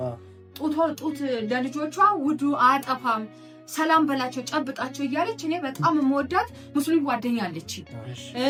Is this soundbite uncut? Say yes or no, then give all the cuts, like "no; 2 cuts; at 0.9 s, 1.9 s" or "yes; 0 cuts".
yes; 0 cuts